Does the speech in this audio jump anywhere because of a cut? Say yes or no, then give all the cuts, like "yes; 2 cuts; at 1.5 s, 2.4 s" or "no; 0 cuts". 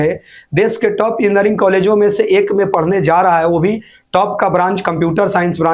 no; 0 cuts